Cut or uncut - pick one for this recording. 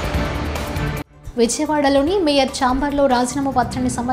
cut